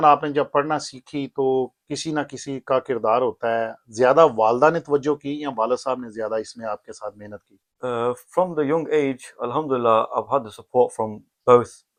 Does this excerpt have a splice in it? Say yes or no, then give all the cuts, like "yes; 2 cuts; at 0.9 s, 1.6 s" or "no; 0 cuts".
no; 0 cuts